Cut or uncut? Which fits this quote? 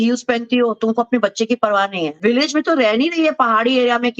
cut